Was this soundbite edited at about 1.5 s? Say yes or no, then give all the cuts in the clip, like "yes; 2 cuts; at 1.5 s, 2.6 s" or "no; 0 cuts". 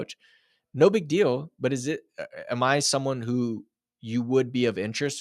no; 0 cuts